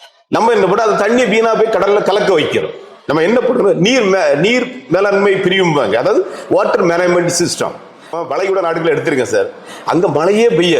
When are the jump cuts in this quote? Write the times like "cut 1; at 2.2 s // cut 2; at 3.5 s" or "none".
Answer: cut 1; at 8.1 s